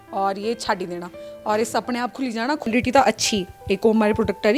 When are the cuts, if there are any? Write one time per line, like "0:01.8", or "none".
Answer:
0:02.7